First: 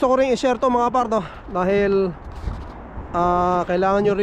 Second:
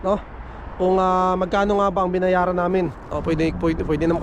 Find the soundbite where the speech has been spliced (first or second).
second